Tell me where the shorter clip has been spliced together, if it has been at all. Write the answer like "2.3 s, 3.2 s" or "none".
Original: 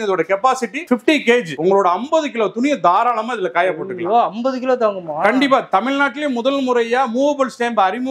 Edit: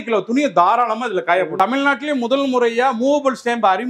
1.5 s